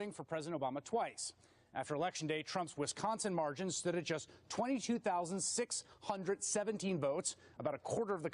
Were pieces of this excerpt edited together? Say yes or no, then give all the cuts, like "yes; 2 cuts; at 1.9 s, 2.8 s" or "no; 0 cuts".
yes; 1 cut; at 1.2 s